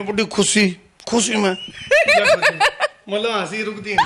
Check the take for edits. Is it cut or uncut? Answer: uncut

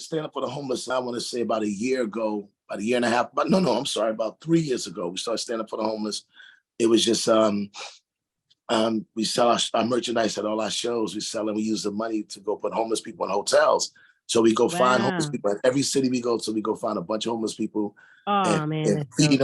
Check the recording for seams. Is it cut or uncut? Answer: cut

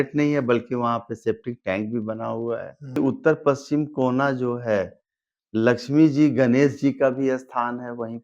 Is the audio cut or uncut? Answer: cut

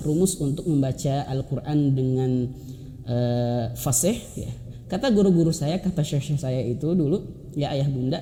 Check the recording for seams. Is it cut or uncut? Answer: uncut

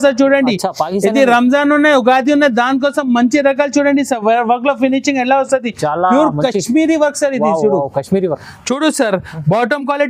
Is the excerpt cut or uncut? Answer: uncut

